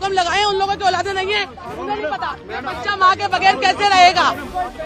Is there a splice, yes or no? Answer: no